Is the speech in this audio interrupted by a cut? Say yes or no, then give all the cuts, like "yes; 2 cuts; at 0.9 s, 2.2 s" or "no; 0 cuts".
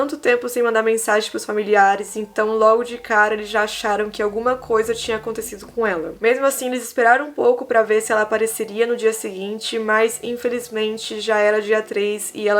no; 0 cuts